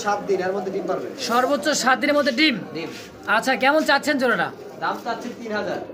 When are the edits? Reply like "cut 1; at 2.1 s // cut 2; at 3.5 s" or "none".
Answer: none